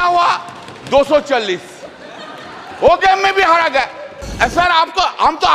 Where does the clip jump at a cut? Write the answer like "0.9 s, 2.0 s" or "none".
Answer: 4.3 s